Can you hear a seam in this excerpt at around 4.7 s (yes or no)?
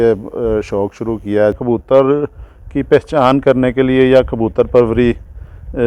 no